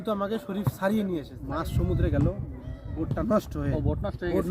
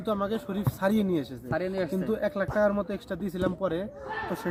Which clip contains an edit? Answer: first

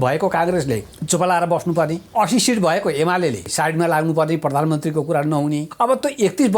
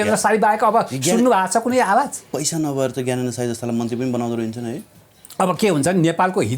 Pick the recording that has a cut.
first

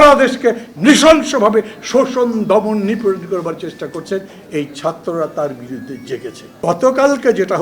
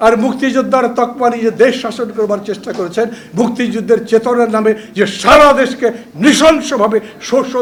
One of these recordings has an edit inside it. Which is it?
first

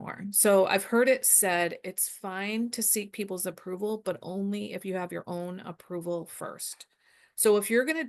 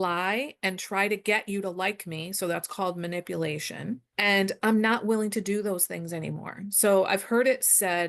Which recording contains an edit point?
second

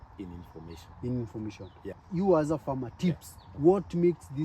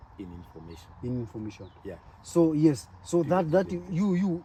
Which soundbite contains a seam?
first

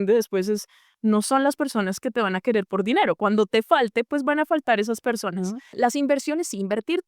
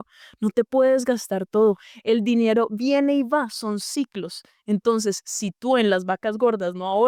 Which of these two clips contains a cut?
first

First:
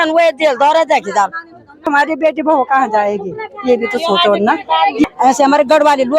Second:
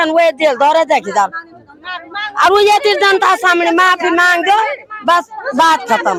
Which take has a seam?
first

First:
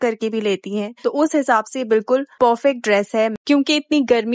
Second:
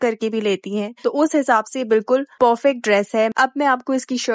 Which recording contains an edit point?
second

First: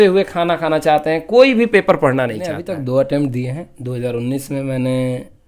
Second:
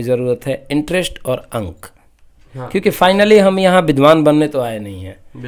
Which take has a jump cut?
first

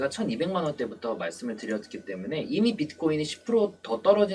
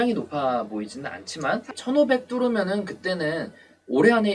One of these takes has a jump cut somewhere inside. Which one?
second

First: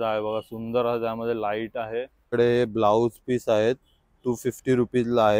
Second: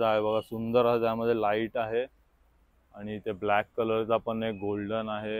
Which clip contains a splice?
first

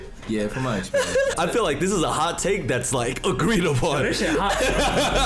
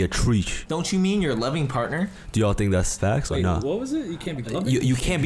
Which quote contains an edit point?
first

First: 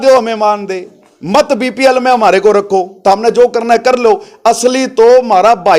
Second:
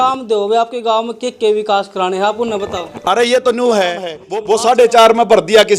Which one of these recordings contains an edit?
second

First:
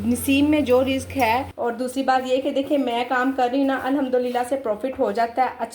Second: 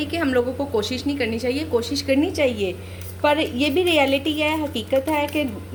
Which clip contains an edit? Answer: first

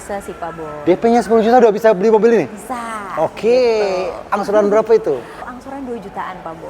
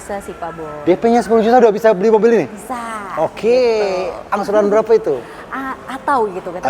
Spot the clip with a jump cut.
first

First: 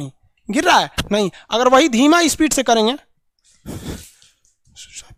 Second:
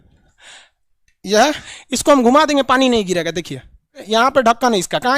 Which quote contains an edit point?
second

